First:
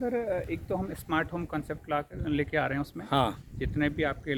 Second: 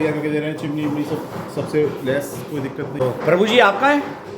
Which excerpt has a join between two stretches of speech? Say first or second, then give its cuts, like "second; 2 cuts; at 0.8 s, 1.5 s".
second; 1 cut; at 3.0 s